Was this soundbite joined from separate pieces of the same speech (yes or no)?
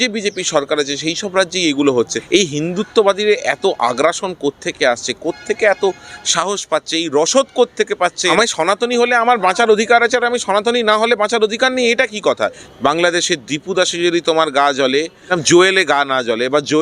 yes